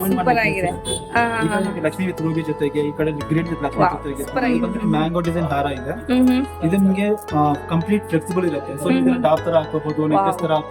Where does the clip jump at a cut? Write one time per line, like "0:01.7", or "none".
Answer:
0:04.3